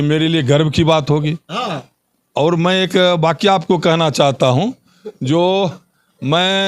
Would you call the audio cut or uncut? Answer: uncut